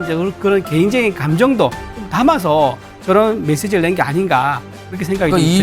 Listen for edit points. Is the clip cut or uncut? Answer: uncut